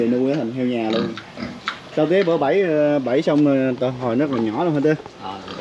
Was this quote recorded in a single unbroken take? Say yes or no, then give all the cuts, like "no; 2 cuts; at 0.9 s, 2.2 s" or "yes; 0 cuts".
yes; 0 cuts